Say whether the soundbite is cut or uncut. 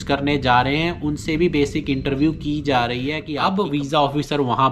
cut